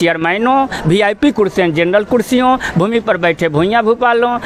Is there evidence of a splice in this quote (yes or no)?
no